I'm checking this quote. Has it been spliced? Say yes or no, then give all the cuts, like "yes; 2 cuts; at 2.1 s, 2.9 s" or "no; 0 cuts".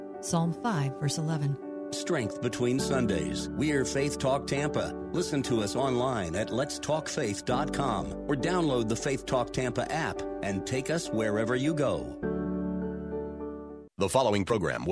yes; 1 cut; at 13.8 s